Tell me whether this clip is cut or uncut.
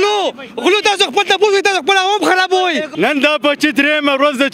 cut